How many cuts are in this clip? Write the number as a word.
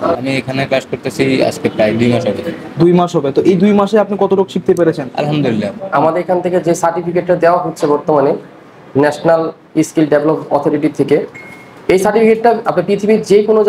one